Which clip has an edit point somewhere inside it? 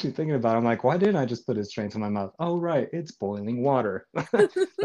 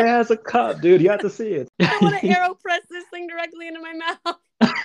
second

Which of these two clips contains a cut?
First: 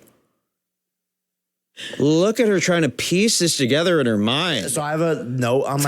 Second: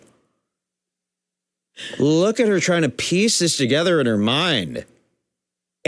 first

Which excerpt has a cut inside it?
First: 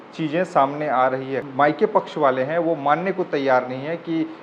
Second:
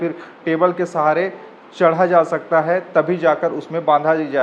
first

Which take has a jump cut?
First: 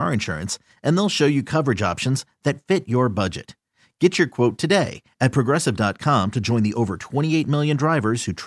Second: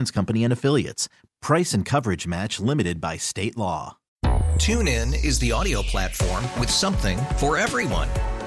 second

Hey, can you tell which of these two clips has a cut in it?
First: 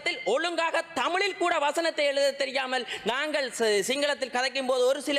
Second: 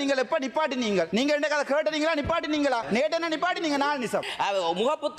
second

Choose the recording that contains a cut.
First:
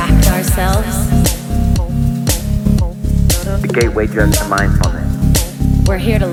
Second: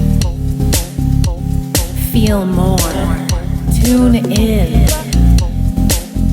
second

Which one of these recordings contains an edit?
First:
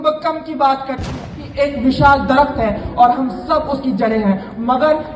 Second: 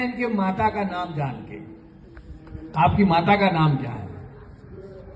first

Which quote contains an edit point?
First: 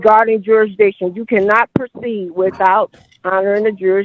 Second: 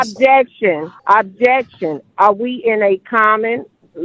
second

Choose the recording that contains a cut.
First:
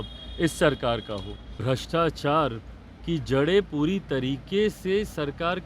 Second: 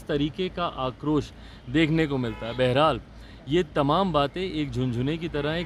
first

